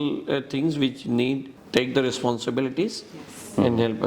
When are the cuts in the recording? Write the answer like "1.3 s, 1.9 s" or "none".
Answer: 1.5 s